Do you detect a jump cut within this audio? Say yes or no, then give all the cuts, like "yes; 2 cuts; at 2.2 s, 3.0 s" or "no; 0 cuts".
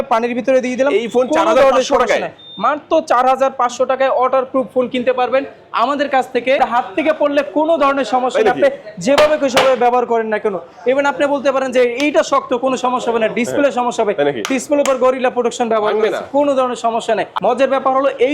yes; 2 cuts; at 6.6 s, 17.3 s